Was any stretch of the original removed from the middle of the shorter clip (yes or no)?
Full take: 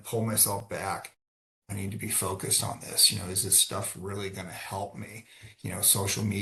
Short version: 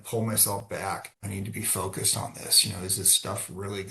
yes